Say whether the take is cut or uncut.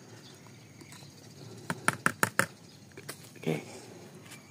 uncut